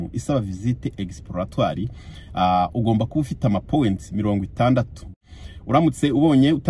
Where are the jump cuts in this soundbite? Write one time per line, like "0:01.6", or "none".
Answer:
0:05.1